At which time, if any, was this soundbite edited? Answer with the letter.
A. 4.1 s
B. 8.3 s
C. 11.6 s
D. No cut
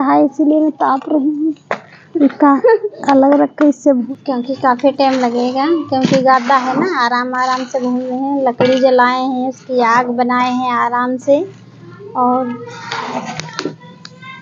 A